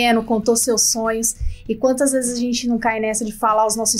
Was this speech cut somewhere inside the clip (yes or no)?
no